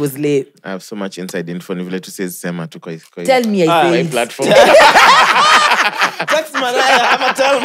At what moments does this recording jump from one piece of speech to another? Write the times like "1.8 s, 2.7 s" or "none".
none